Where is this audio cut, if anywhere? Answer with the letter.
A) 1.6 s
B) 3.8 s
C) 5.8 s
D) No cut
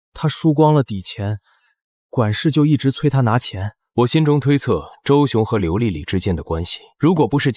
B